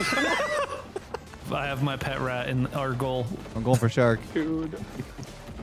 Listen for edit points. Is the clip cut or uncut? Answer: cut